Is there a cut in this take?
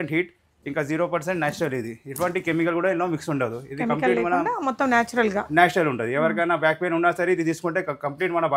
no; 0 cuts

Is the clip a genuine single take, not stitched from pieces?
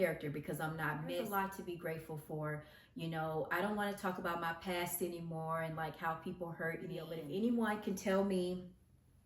no; 2 cuts; at 1.2 s, 7.2 s

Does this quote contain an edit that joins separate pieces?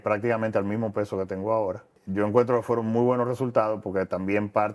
yes; 1 cut; at 2.0 s

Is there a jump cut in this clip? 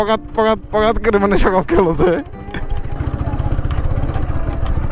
no; 0 cuts

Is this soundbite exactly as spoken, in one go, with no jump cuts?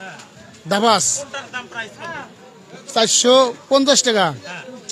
yes; 0 cuts

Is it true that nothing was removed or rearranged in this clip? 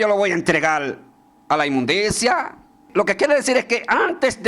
no; 1 cut; at 2.8 s

